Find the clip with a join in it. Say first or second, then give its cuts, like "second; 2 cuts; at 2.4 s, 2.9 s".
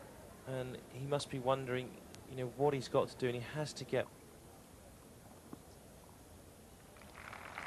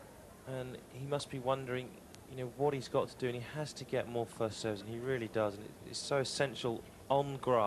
second; 1 cut; at 4.1 s